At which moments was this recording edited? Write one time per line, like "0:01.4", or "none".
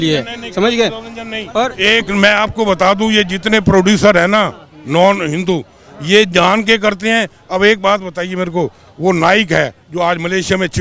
none